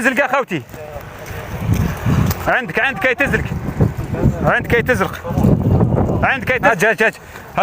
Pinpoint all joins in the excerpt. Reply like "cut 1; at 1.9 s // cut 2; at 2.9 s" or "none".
cut 1; at 6.7 s